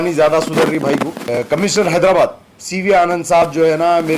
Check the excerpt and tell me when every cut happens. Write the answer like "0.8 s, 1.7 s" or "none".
1.1 s